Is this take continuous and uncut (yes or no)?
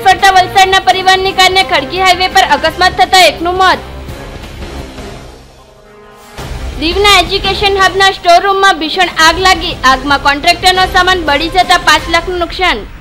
yes